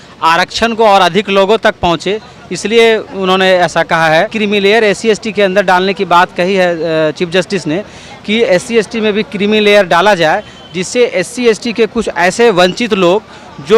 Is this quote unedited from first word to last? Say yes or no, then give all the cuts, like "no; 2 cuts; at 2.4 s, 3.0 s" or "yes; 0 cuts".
no; 1 cut; at 4.3 s